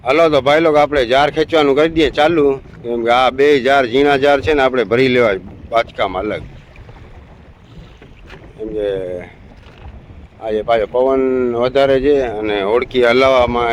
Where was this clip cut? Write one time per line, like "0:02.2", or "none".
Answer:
none

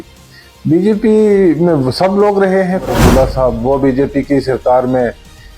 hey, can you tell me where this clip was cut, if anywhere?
0:02.9

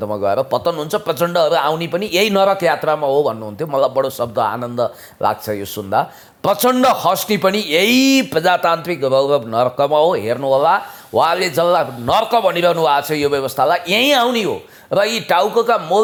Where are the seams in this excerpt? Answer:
none

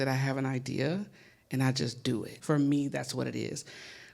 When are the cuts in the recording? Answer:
0:02.3

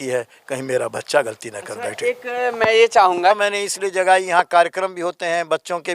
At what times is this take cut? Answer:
0:03.4

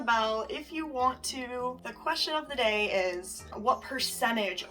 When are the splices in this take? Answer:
0:01.9
0:03.5

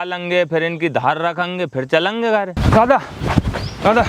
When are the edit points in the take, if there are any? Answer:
0:02.6

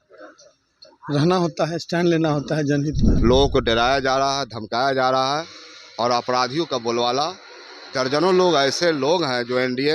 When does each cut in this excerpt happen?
0:03.1

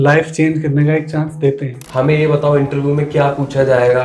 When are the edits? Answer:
0:01.8

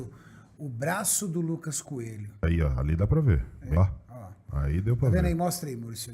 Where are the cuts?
0:02.4
0:03.8

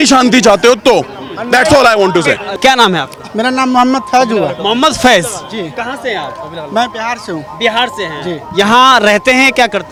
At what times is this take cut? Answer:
none

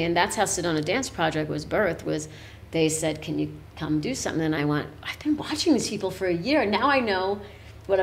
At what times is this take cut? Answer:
none

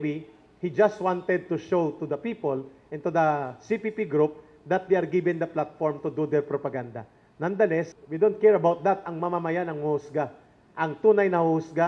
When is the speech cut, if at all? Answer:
0:08.0

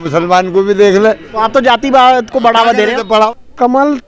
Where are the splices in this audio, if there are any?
0:03.0

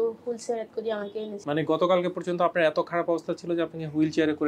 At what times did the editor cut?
0:01.4

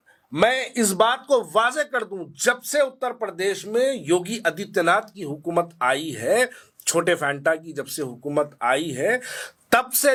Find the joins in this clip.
none

